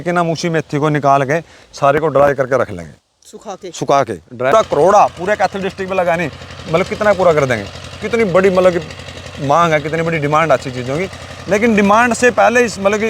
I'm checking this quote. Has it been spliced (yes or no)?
yes